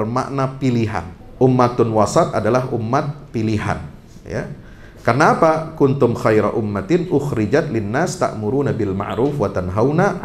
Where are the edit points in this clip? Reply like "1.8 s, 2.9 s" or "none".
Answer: 1.2 s